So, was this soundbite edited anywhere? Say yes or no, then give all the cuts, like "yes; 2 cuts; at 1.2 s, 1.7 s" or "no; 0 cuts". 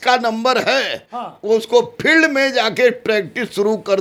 no; 0 cuts